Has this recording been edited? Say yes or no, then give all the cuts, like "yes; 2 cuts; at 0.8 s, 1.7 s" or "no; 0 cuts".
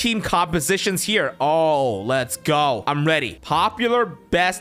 no; 0 cuts